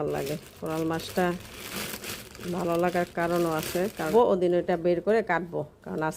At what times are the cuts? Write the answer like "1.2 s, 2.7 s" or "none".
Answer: 4.1 s